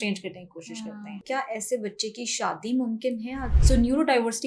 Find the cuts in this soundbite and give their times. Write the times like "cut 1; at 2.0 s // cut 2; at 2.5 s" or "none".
cut 1; at 1.2 s // cut 2; at 3.5 s